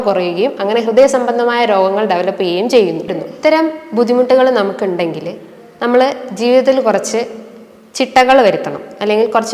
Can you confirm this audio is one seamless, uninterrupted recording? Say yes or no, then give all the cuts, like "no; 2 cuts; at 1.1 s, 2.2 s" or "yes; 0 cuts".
no; 1 cut; at 3.3 s